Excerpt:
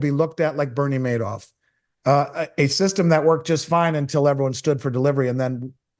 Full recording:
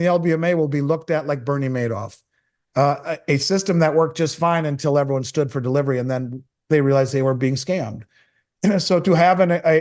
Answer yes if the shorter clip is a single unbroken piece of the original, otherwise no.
yes